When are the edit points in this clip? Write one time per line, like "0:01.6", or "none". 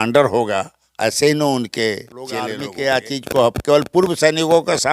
0:02.6